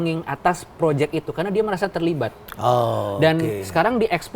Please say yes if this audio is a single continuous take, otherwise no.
yes